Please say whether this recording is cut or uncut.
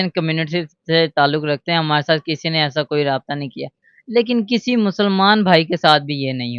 uncut